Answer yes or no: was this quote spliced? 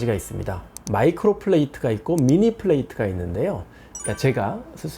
yes